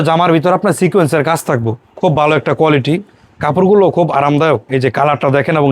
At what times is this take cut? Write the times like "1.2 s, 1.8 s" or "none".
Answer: 1.8 s

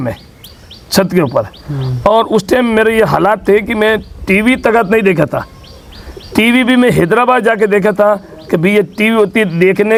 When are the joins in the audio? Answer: none

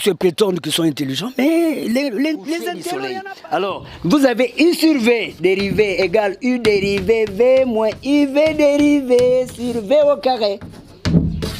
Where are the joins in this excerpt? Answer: 3.1 s

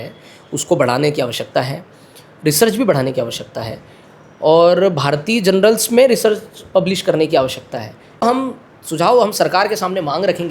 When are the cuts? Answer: 8.3 s

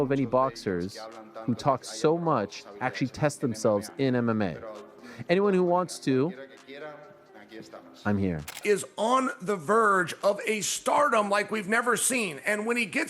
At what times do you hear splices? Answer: 8.5 s

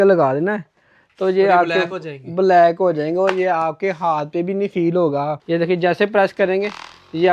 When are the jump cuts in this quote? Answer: 5.4 s

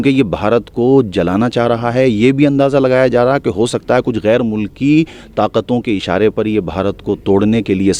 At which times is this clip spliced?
none

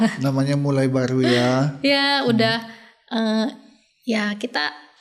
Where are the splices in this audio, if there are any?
none

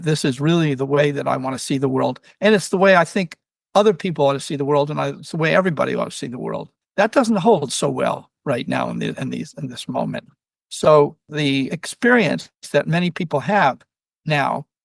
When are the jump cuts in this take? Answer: 6.7 s, 11.5 s, 12.5 s

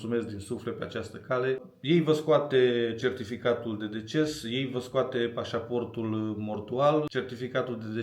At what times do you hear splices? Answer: 1.6 s, 7.1 s

